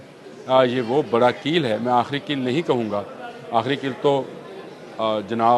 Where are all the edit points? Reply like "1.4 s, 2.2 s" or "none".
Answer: none